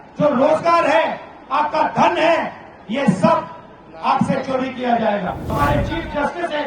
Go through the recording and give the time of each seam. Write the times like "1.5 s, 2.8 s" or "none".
5.4 s